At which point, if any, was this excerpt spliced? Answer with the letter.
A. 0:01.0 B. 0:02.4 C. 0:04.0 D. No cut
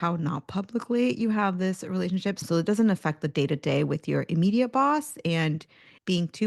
B